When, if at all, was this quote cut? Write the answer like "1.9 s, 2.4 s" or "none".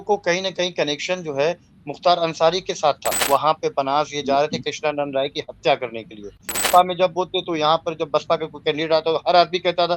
3.2 s, 6.6 s